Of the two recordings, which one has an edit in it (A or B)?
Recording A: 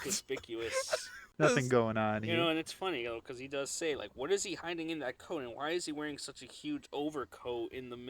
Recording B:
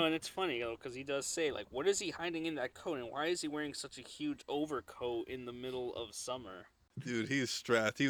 A